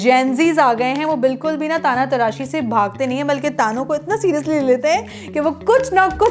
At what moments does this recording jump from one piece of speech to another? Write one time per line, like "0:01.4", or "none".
none

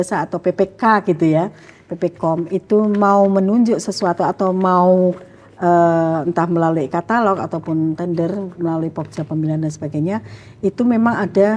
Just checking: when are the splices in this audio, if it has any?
none

